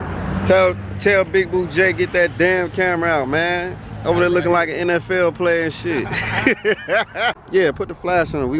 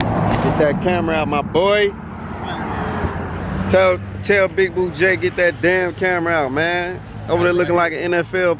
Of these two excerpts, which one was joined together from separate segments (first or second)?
first